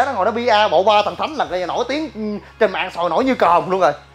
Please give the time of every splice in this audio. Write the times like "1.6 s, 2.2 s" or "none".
none